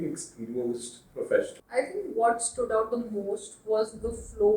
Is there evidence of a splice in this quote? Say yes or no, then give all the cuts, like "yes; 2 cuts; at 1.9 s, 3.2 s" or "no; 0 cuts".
yes; 1 cut; at 1.6 s